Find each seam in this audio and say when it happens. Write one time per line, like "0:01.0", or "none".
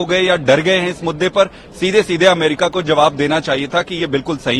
none